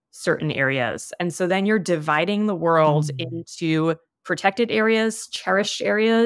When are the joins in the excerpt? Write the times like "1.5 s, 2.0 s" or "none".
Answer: none